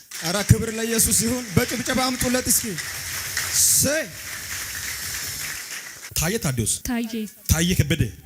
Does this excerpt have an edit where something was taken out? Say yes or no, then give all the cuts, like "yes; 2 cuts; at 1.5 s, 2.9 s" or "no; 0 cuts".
yes; 2 cuts; at 6.0 s, 6.8 s